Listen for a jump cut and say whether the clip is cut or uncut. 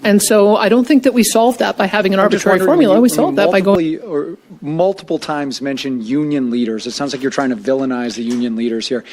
cut